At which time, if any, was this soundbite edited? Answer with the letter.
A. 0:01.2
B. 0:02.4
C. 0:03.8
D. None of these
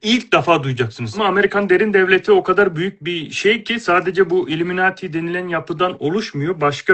A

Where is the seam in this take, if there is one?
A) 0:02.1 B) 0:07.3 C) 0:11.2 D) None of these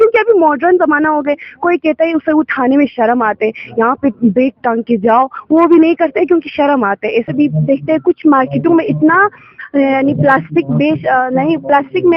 B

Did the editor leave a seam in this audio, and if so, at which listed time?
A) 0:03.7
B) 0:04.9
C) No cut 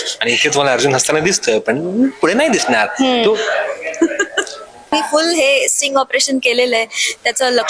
B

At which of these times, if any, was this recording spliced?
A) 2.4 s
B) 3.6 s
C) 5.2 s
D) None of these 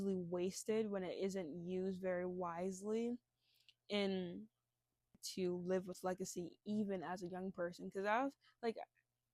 C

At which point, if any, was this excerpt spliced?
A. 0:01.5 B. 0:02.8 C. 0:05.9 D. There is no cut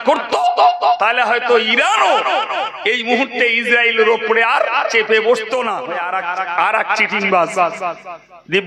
C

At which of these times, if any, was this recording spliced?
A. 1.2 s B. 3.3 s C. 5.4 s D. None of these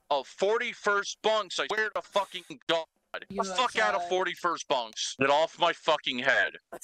B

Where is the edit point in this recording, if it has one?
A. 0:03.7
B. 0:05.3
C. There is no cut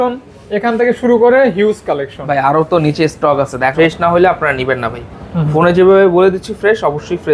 A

